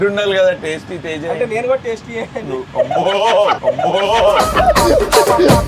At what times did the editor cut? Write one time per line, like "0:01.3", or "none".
none